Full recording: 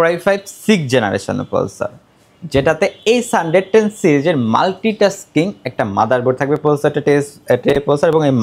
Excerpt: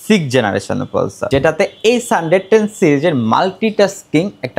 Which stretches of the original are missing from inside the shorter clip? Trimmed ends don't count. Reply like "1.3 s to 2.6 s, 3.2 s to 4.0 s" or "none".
1.8 s to 2.4 s